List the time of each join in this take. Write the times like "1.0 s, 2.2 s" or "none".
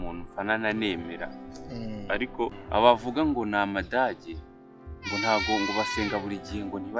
2.6 s